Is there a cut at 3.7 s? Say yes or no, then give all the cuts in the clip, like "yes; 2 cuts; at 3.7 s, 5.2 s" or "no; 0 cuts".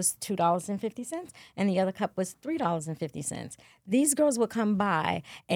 no; 0 cuts